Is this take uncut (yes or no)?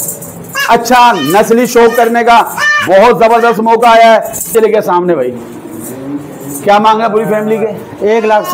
no